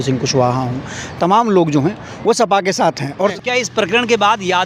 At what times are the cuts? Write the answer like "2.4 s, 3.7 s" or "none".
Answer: 3.3 s